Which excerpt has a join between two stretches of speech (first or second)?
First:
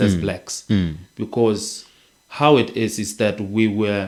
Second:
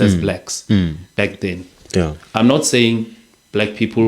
second